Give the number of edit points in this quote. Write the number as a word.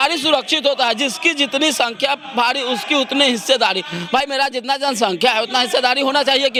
zero